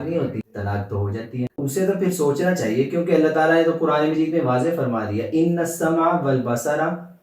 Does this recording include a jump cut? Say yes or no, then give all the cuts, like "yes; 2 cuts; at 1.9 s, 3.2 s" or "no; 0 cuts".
yes; 1 cut; at 1.6 s